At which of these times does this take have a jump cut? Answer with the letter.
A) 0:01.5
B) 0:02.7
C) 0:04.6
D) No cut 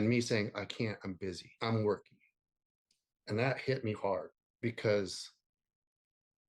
A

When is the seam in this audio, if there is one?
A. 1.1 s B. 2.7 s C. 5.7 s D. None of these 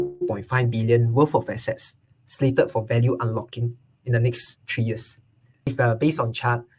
C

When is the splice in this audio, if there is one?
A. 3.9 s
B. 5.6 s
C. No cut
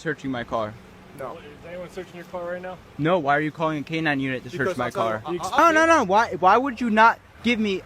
B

